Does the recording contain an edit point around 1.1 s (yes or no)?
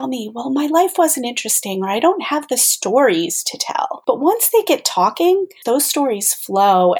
no